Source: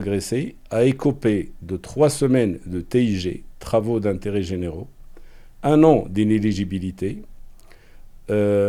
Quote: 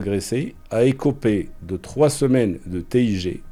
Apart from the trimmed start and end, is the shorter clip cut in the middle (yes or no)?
no